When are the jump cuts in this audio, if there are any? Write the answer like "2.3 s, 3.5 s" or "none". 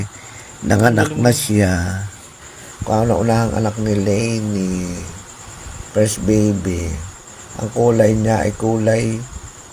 2.7 s